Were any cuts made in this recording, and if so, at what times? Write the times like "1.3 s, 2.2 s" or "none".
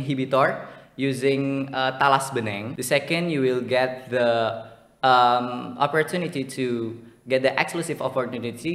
2.7 s

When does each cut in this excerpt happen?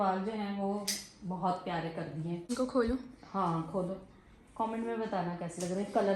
2.5 s

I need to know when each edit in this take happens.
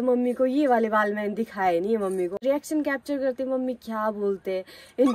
2.4 s

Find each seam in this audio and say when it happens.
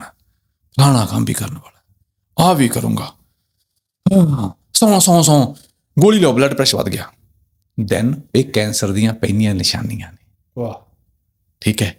none

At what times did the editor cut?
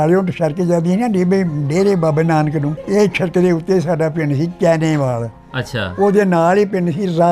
2.8 s

